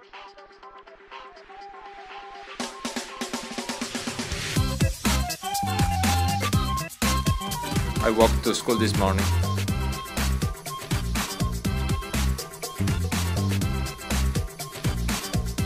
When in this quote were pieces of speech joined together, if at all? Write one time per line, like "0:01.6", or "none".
0:07.9